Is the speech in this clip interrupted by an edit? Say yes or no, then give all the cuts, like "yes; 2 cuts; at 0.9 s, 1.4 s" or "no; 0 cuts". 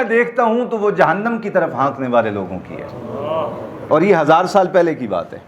no; 0 cuts